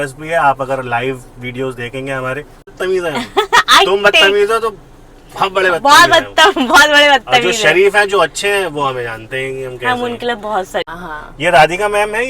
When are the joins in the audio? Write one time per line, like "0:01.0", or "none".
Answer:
0:02.7
0:10.9